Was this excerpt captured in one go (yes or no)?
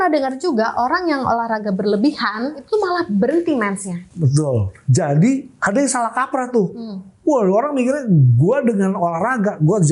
no